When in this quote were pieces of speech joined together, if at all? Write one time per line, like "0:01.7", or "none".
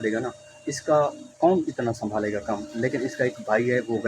none